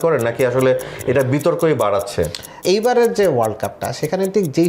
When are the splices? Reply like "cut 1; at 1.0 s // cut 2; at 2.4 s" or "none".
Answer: cut 1; at 2.5 s